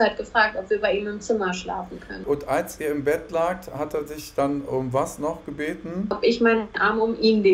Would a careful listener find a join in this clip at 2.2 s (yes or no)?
yes